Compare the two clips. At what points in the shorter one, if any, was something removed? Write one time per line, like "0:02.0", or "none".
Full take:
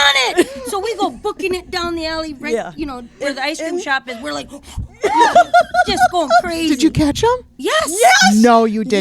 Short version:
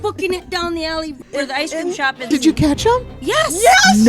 0:01.2
0:02.3